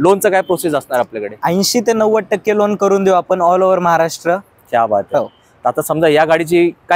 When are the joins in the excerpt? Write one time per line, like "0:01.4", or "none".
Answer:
none